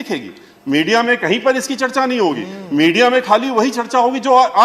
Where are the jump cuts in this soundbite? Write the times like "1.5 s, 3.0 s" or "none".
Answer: none